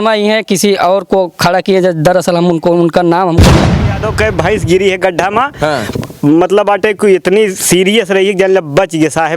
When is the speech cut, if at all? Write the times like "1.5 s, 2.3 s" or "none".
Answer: 3.8 s